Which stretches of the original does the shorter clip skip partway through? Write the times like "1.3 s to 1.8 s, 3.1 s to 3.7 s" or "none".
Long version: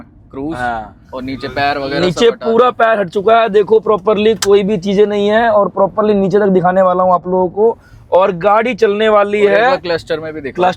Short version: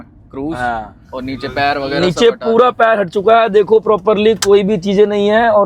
none